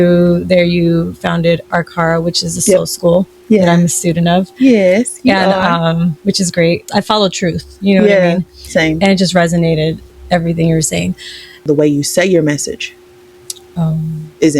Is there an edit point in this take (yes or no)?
yes